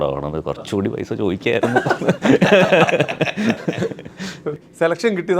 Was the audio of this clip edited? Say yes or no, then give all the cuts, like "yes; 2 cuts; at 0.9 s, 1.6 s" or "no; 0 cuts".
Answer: no; 0 cuts